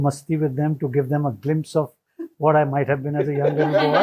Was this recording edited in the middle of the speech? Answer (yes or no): no